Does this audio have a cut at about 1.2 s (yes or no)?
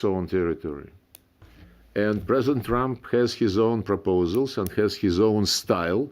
yes